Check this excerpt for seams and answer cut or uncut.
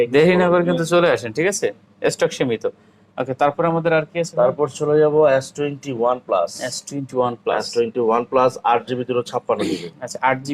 uncut